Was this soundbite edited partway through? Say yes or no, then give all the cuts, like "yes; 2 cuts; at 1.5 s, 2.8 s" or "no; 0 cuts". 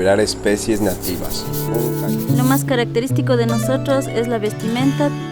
yes; 1 cut; at 1.6 s